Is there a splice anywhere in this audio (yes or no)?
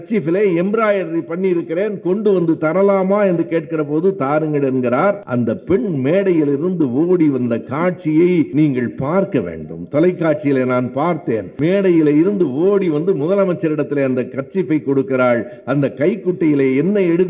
yes